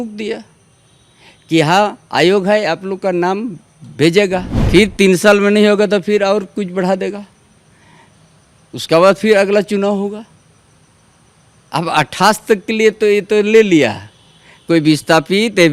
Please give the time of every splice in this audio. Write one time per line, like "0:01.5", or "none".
0:04.6